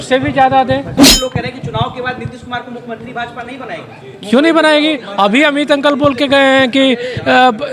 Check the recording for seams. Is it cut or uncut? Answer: cut